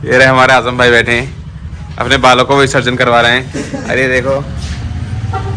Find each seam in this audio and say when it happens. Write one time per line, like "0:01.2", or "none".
none